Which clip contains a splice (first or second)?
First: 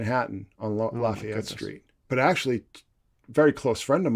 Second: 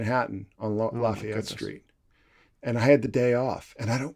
first